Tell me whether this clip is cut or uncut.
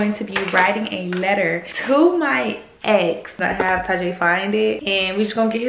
cut